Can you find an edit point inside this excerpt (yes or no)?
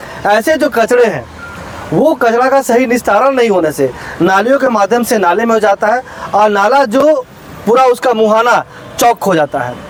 no